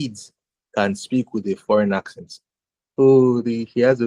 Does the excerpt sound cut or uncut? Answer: uncut